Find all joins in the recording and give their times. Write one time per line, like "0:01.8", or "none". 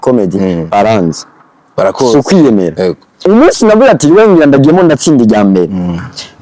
0:03.2

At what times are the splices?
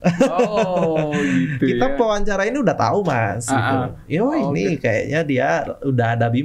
none

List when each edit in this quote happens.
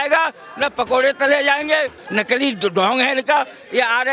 0:02.0

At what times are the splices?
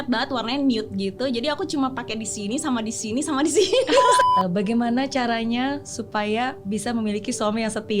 0:04.2

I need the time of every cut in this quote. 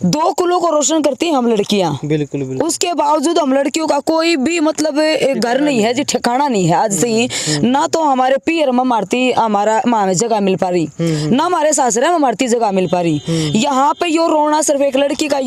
none

